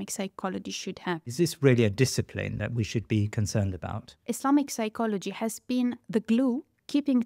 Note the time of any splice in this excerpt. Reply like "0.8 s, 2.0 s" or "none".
1.3 s, 4.2 s